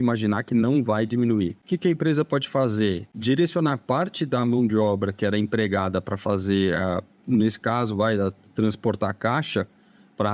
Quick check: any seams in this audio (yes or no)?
yes